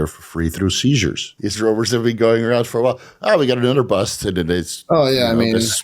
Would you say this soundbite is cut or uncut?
cut